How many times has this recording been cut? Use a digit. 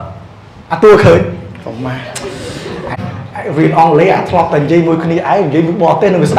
1